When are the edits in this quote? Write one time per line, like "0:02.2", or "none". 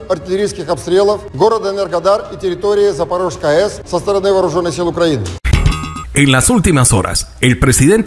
0:01.3
0:03.8
0:05.4